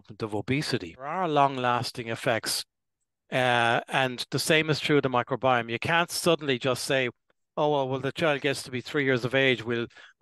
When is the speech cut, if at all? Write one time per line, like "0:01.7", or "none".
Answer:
0:01.2